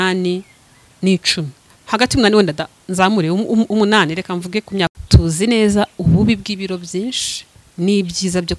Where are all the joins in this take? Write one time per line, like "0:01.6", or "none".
0:05.0